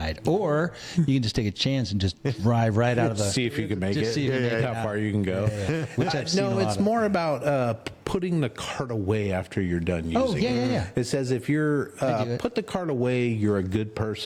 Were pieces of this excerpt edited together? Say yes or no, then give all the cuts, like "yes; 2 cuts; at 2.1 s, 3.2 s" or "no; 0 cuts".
no; 0 cuts